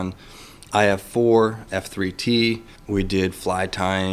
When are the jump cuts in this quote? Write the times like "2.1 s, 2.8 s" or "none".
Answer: 1.6 s, 2.7 s